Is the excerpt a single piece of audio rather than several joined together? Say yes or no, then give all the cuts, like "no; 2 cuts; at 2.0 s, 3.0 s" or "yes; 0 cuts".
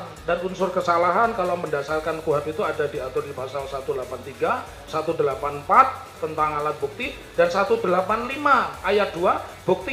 yes; 0 cuts